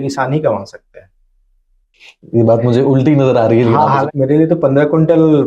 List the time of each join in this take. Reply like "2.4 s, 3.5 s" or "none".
4.0 s